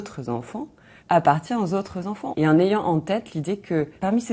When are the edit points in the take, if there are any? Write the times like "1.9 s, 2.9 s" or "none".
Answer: 2.2 s